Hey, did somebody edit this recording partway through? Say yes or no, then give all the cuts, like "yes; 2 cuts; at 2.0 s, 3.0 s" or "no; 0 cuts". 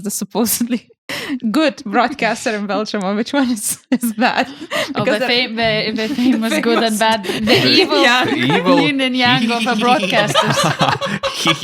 no; 0 cuts